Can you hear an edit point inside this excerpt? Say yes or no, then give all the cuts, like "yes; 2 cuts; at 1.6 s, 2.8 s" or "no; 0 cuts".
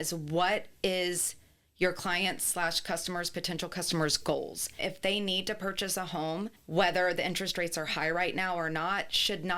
yes; 2 cuts; at 4.6 s, 6.6 s